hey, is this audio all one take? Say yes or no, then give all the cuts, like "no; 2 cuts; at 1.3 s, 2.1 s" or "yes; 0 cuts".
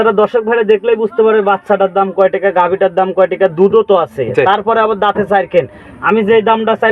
yes; 0 cuts